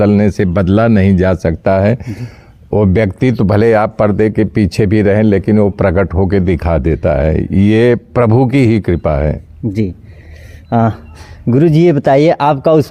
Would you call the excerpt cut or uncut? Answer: uncut